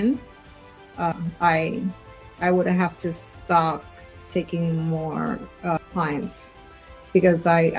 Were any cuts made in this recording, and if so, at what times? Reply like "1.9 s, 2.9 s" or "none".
none